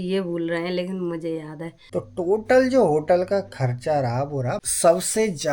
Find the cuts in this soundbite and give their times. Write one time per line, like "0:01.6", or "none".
0:01.8
0:04.6